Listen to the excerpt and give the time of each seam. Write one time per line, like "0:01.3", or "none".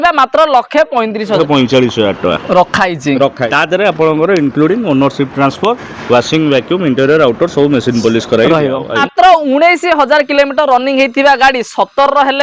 0:01.4
0:03.4
0:09.0